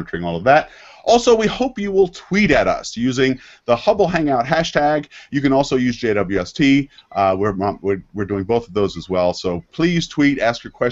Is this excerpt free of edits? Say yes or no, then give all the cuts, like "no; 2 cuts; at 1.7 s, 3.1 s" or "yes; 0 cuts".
no; 1 cut; at 4.7 s